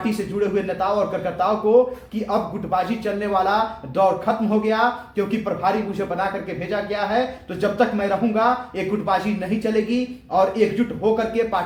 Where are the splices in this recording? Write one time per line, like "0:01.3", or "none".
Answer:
none